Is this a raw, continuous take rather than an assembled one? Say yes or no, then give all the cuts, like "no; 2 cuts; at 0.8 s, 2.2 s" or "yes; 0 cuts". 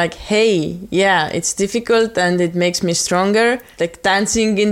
no; 1 cut; at 3.7 s